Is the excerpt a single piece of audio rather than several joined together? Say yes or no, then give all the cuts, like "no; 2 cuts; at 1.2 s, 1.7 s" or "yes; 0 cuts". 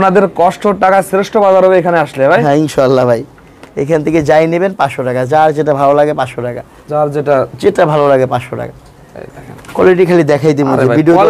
yes; 0 cuts